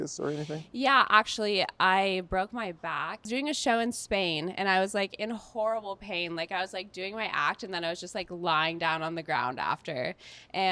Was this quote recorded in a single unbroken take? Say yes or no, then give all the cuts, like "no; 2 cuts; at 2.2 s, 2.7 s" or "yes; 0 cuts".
no; 1 cut; at 3.3 s